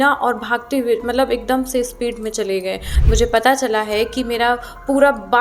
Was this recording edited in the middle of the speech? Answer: yes; 1 cut; at 2.9 s

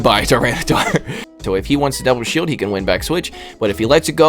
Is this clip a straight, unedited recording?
no; 1 cut; at 1.3 s

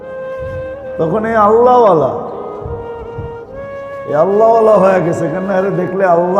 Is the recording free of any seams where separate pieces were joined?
no; 1 cut; at 1.0 s

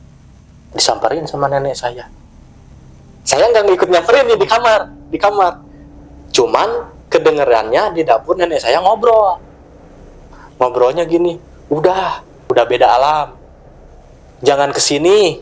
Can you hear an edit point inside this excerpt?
no; 0 cuts

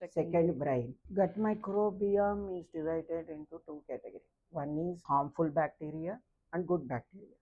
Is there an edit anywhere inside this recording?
yes; 2 cuts; at 1.0 s, 5.0 s

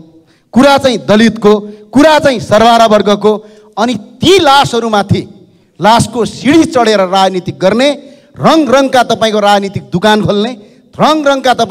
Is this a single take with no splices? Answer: yes; 0 cuts

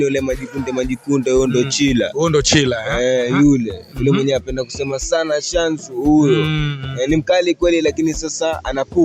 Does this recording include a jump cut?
no; 0 cuts

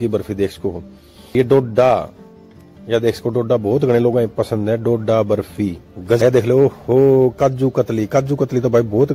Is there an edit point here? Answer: yes; 2 cuts; at 1.3 s, 6.2 s

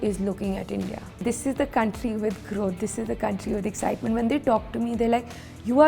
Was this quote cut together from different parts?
yes; 1 cut; at 1.2 s

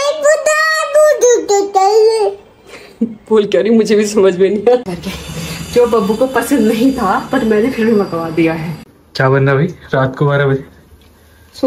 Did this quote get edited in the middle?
yes; 2 cuts; at 4.8 s, 8.7 s

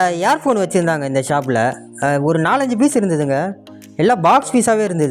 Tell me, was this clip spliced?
no; 0 cuts

